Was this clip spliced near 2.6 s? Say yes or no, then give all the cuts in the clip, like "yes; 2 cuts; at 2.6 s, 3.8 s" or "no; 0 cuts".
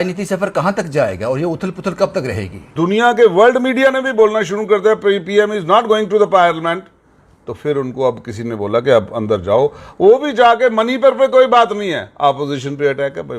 yes; 1 cut; at 2.6 s